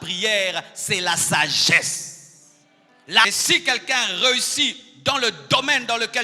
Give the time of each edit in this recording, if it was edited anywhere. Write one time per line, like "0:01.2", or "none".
0:03.2

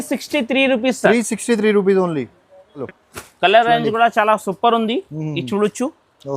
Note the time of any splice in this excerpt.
0:02.8

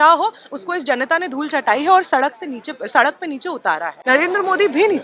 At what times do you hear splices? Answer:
0:03.9

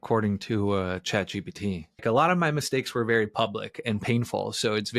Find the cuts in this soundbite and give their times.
0:02.0

